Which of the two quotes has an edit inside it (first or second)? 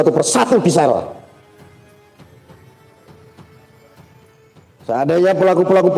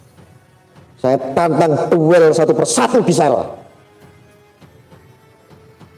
first